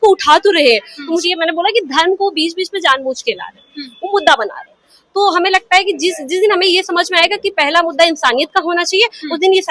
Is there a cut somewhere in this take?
yes; 1 cut; at 1.2 s

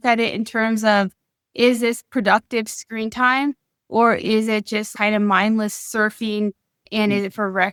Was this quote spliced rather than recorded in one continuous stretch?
no; 0 cuts

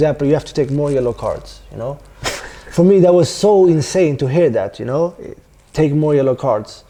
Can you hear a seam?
no; 0 cuts

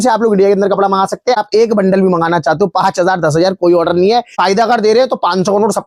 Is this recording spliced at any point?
yes; 2 cuts; at 1.4 s, 4.4 s

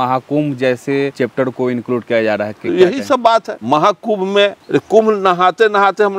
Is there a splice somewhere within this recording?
yes; 3 cuts; at 1.1 s, 3.5 s, 4.6 s

